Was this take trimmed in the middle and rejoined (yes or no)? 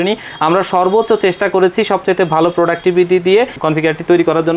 yes